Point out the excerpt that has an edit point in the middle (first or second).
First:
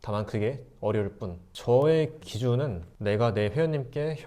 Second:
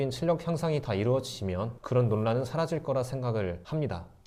first